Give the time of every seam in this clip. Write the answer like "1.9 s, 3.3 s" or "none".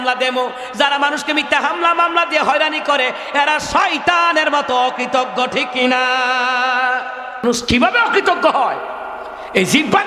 7.4 s

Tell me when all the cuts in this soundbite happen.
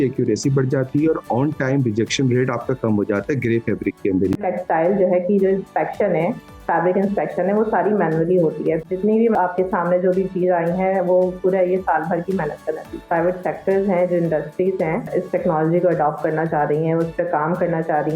4.4 s, 9.2 s, 13.0 s, 15.1 s

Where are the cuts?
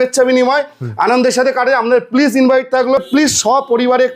3.0 s

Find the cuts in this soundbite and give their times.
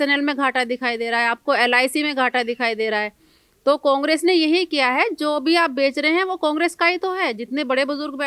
none

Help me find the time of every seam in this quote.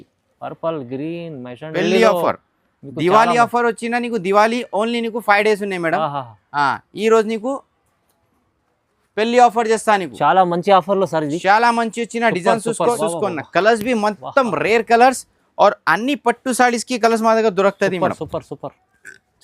1.7 s, 13.0 s

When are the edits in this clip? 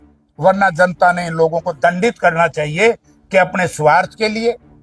none

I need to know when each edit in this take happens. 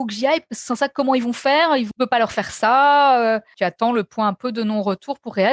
1.9 s, 3.5 s

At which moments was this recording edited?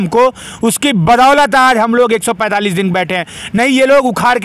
none

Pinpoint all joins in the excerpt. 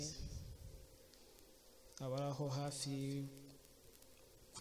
none

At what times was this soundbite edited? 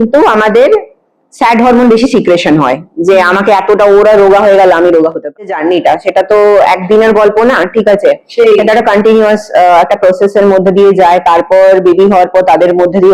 5.5 s

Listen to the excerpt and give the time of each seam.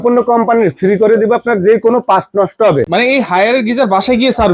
none

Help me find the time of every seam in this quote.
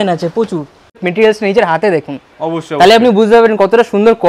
1.0 s

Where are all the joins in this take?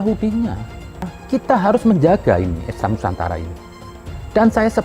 1.1 s

